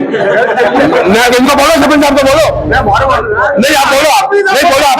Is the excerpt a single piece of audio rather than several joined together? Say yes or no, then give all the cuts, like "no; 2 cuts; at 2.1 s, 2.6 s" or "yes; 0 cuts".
yes; 0 cuts